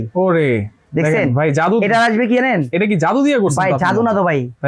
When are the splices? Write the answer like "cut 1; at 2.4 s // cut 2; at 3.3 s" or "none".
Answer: none